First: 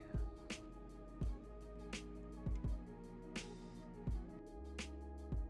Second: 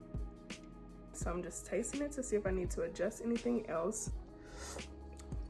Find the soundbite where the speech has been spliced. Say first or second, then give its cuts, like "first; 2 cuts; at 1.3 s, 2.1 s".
second; 2 cuts; at 1.2 s, 4.0 s